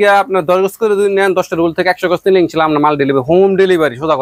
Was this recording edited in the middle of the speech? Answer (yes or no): no